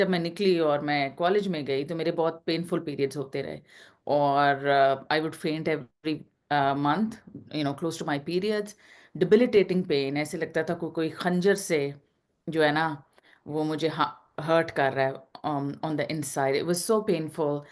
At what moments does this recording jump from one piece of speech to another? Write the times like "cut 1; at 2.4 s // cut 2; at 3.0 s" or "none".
none